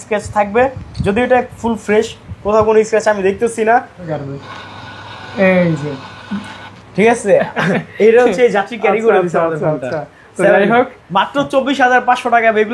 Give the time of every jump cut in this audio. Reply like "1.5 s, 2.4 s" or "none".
4.1 s